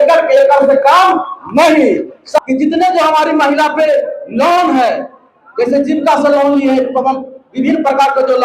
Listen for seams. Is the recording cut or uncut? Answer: cut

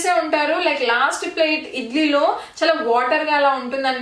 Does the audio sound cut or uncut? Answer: uncut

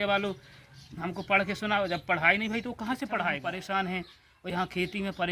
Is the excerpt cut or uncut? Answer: cut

